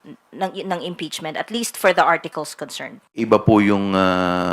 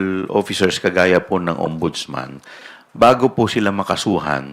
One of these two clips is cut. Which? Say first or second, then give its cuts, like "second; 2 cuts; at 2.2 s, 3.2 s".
first; 1 cut; at 3.3 s